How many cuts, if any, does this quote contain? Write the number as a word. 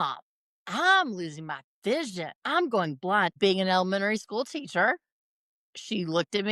two